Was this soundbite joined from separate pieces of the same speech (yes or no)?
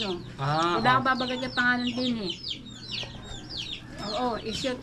no